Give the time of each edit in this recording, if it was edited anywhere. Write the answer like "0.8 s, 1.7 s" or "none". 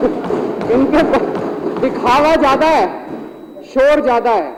none

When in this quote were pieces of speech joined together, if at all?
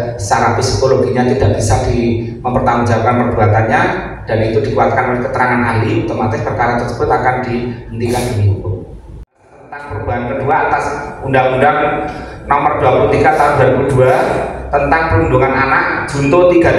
9.6 s

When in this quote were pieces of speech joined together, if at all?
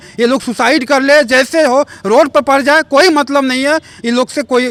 none

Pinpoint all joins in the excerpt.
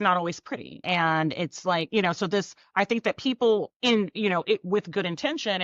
0.8 s, 2.6 s, 3.7 s

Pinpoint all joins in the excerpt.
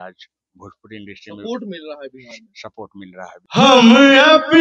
3.4 s

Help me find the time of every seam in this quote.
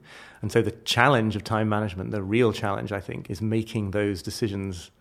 3.2 s

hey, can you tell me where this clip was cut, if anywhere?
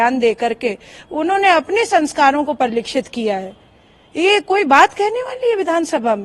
none

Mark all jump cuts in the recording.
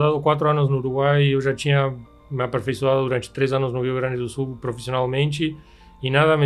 none

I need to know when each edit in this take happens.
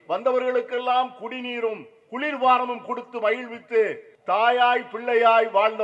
4.1 s

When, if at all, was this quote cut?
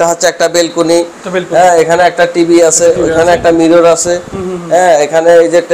none

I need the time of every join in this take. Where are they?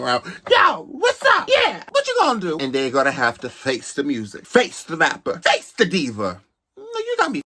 5.4 s

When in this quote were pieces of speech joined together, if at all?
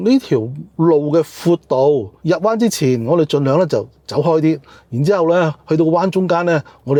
none

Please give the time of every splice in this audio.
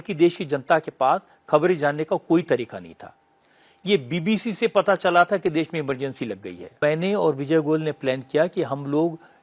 6.8 s

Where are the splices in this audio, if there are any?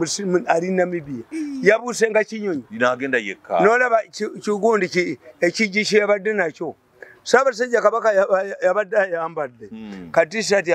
none

